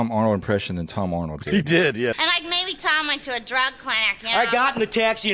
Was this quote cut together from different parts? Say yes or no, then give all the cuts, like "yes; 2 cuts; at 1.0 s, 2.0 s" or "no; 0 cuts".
yes; 1 cut; at 2.1 s